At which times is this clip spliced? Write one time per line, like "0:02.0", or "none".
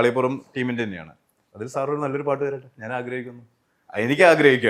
none